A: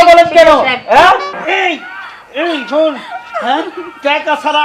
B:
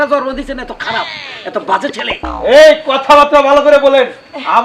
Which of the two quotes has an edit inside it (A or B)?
A